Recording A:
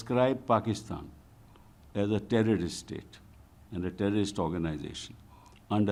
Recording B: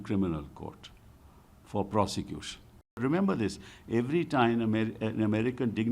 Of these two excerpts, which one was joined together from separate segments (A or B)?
B